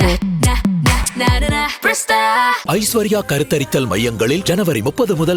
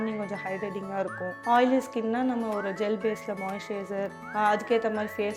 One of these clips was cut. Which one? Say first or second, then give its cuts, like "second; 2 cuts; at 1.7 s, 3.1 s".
second; 2 cuts; at 1.4 s, 4.2 s